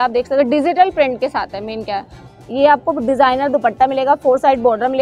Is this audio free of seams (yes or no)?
yes